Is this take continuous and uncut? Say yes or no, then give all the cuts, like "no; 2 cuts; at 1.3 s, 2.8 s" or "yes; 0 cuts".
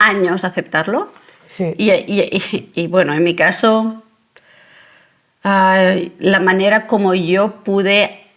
yes; 0 cuts